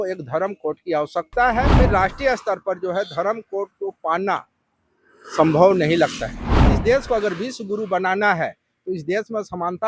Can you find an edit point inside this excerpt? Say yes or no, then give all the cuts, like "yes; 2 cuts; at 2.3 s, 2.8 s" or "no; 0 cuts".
yes; 2 cuts; at 1.7 s, 6.7 s